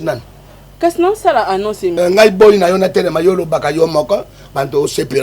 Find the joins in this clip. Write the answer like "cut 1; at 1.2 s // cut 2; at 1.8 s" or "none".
cut 1; at 1.9 s